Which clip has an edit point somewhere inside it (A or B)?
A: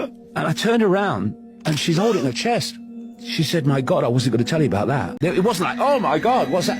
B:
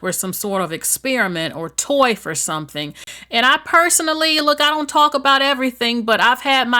A